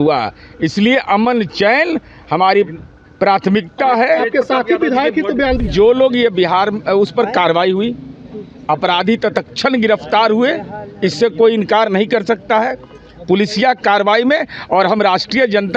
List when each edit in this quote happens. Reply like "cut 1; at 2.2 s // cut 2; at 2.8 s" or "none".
cut 1; at 5.6 s